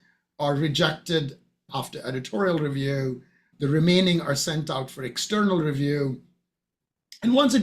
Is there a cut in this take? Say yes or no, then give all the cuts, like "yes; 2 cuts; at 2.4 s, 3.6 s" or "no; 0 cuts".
yes; 1 cut; at 1.7 s